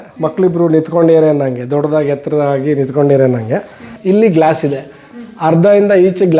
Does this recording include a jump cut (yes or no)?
yes